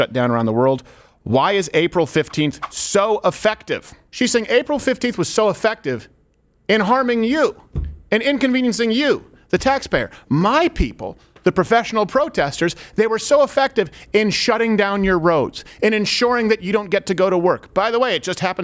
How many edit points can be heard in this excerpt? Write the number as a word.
one